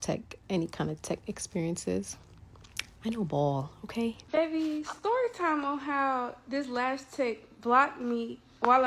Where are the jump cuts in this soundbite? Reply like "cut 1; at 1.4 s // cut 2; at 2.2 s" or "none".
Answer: cut 1; at 4.2 s